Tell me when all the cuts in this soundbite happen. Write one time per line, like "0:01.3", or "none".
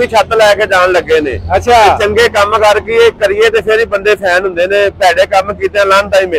none